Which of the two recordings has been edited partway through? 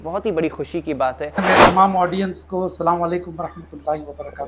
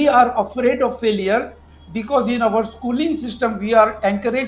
first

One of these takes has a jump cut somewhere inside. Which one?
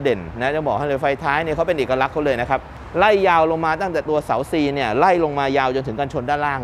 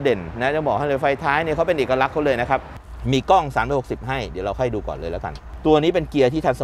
second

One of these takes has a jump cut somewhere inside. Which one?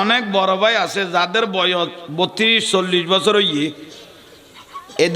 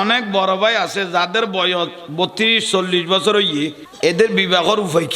second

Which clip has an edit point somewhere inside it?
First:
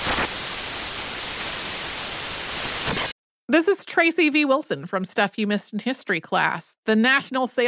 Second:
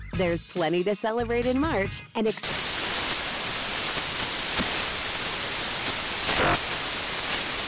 first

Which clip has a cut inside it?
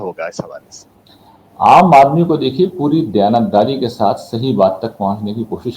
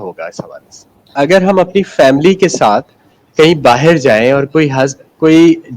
second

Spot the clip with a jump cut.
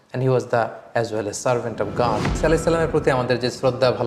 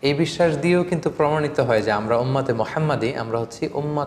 first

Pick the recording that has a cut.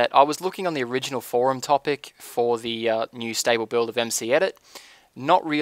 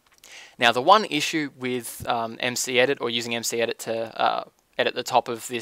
second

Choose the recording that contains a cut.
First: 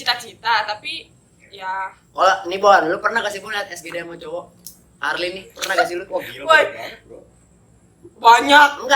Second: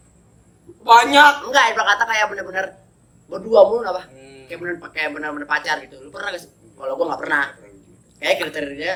first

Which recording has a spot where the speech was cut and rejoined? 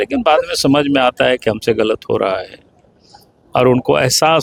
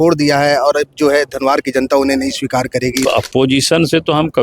second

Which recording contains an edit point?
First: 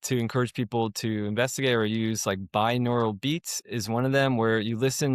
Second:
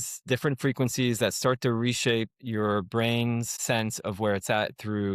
second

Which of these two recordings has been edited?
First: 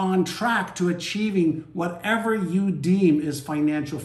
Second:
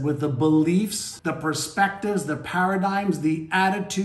second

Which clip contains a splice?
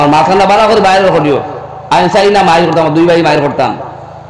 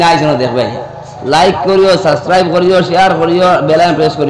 second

